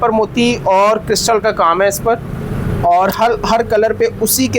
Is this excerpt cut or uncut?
uncut